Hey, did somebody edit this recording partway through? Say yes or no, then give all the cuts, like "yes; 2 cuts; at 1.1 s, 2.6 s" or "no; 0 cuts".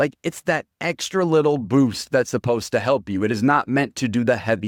no; 0 cuts